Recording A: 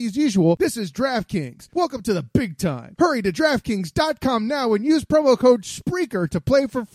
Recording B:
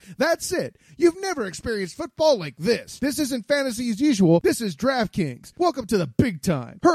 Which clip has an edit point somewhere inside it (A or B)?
B